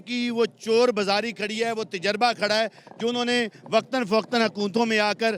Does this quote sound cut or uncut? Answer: uncut